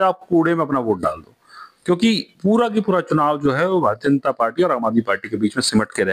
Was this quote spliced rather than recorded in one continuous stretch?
no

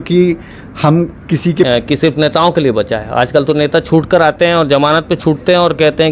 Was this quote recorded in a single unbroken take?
no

